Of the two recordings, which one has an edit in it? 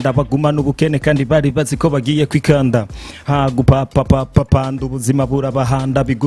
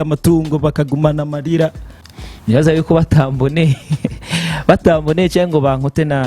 second; 1 cut; at 2.1 s

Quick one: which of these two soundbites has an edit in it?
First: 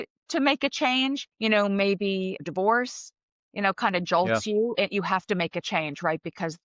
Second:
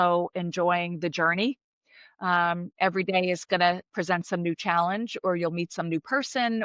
first; 2 cuts; at 1.3 s, 2.4 s

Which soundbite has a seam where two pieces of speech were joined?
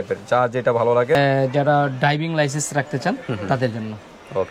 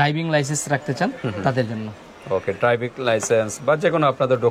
first; 1 cut; at 1.1 s

